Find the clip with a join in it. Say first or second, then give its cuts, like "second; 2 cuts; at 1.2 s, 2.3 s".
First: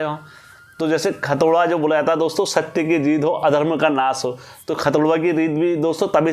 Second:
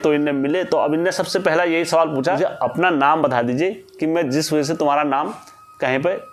second; 1 cut; at 2.4 s